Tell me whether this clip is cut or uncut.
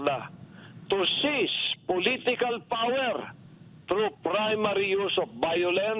uncut